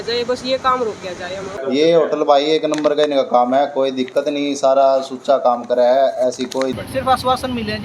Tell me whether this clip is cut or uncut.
cut